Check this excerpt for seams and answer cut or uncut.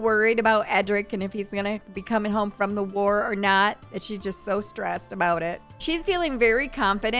uncut